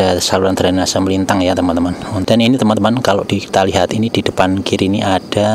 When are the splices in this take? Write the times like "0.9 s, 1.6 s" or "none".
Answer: 2.1 s

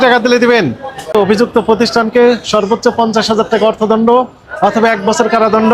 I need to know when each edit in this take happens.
1.1 s

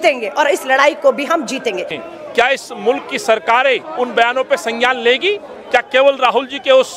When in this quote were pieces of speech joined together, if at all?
1.9 s

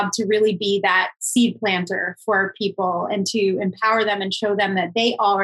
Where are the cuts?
none

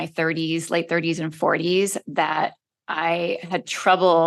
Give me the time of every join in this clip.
none

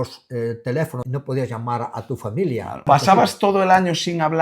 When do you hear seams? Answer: 1.0 s, 2.8 s

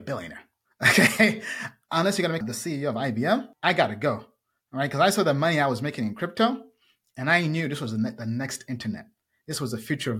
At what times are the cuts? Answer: 2.4 s, 3.5 s

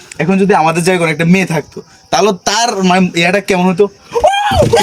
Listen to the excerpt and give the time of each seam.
none

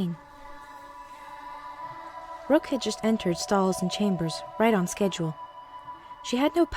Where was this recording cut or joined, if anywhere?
none

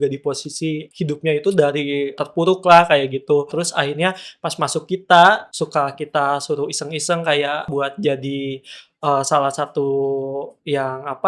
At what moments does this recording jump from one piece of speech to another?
0.9 s, 2.2 s, 3.5 s, 5.5 s, 7.7 s

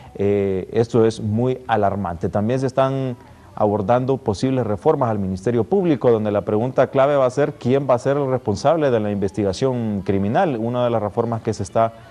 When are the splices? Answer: 10.8 s

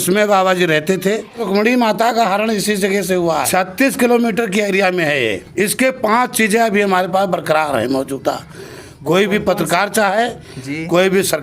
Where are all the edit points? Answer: 1.4 s, 3.5 s, 5.4 s

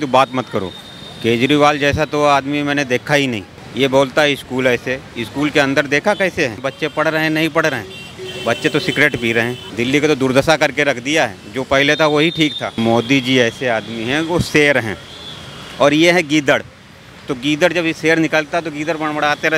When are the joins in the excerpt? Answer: 3.6 s, 6.6 s, 9.6 s, 12.8 s

